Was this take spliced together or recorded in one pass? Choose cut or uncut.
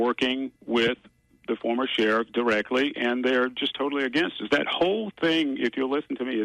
uncut